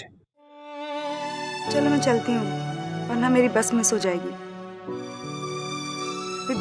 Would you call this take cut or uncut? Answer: cut